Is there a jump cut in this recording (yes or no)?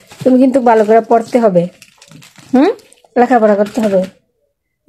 no